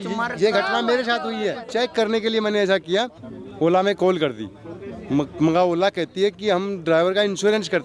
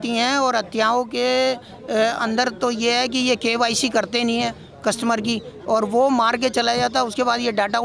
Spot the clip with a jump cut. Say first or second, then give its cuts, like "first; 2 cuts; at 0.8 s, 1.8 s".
first; 2 cuts; at 1.6 s, 3.2 s